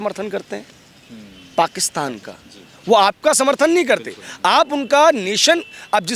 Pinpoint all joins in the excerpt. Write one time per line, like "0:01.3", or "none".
none